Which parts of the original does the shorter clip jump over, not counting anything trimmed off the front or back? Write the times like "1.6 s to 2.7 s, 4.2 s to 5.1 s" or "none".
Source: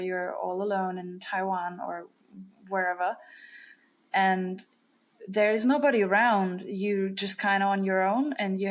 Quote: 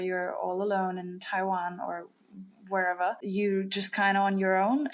3.2 s to 6.7 s